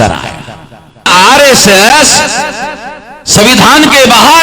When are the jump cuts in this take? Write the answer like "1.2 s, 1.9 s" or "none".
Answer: 1.1 s